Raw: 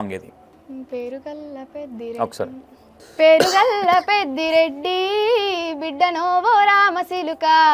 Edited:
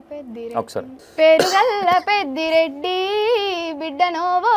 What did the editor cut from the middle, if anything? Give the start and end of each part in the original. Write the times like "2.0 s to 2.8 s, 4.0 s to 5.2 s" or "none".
2.6 s to 3.0 s